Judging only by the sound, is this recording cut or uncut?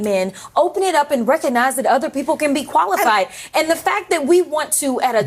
uncut